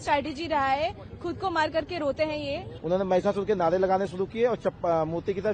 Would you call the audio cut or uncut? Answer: cut